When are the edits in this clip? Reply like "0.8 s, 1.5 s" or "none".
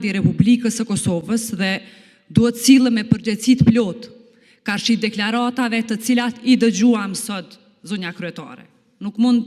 none